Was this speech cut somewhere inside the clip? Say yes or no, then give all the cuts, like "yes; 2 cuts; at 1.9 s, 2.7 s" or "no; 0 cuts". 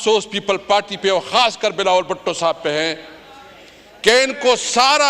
no; 0 cuts